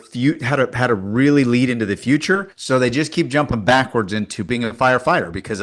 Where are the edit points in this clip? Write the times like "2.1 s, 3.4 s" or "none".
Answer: 2.5 s, 4.4 s